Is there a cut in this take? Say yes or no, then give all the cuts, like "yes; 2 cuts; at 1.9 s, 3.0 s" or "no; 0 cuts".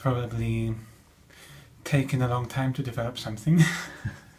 no; 0 cuts